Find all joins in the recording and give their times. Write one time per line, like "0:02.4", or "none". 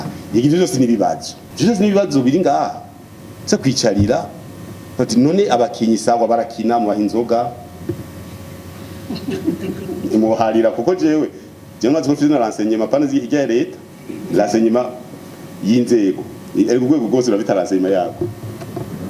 none